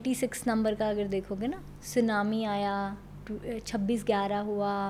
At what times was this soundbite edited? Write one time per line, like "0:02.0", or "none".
none